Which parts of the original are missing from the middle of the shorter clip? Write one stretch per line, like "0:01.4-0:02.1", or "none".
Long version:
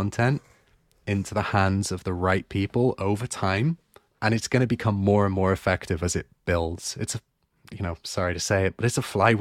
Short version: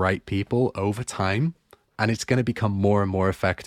none